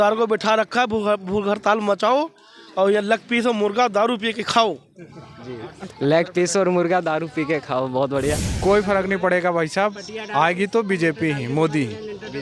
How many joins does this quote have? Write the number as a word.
one